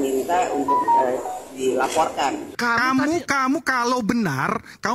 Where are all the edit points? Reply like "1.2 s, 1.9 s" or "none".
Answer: 2.5 s